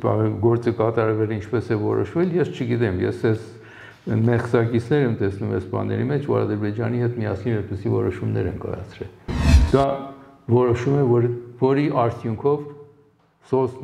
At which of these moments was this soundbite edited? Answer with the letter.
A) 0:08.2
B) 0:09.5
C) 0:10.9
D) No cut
B